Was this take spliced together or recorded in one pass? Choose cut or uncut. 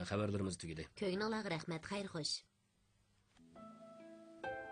cut